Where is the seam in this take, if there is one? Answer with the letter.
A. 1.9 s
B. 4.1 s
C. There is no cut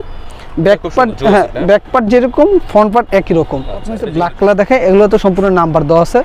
B